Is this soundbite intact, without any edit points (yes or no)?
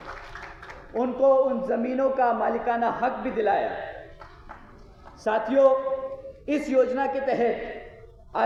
yes